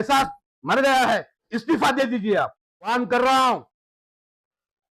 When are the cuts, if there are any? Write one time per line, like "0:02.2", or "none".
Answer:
0:01.5
0:02.9